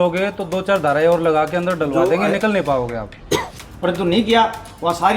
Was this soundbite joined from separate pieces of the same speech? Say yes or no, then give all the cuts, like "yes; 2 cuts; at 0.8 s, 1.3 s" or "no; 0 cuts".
yes; 1 cut; at 3.6 s